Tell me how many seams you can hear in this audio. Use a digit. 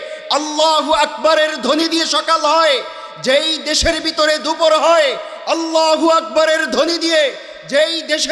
0